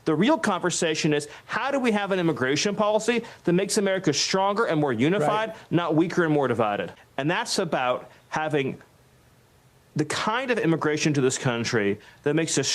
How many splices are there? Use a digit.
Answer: 1